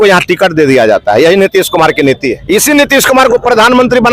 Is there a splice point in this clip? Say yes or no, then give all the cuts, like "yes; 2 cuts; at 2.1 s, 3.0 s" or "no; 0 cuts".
yes; 1 cut; at 2.3 s